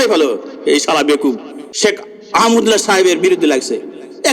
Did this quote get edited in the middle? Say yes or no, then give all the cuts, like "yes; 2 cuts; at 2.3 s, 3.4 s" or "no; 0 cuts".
yes; 1 cut; at 1.7 s